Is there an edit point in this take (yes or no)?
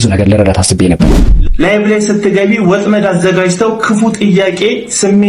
yes